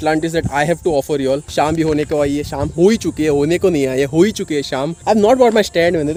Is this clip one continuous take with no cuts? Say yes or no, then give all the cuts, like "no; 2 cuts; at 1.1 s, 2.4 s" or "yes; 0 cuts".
yes; 0 cuts